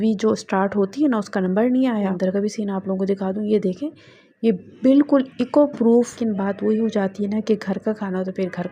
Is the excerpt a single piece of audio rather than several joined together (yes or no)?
no